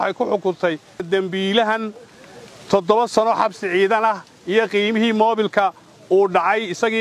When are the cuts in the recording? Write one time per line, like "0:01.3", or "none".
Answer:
0:01.0